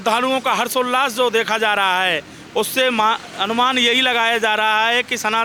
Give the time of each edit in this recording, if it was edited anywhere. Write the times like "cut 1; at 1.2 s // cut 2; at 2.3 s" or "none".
none

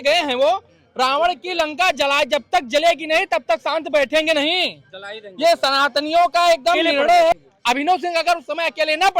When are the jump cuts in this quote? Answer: cut 1; at 7.3 s

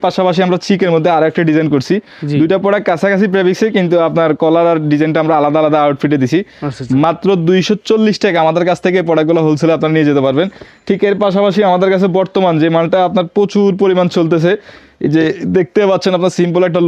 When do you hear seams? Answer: none

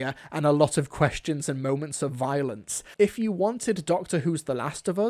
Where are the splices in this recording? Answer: cut 1; at 2.8 s

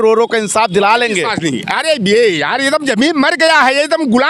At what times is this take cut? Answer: none

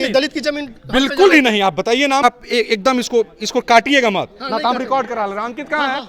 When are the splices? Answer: cut 1; at 2.2 s

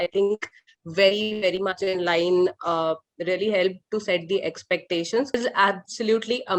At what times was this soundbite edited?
cut 1; at 5.4 s

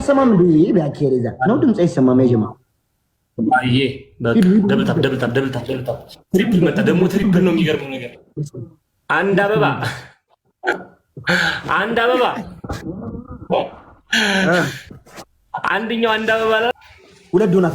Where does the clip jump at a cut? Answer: cut 1; at 16.7 s

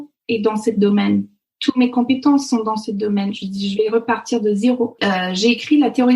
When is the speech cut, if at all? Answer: cut 1; at 5.0 s

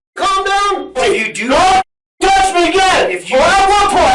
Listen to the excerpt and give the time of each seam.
cut 1; at 1.0 s

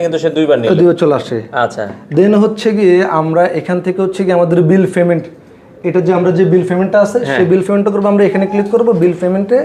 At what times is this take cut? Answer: none

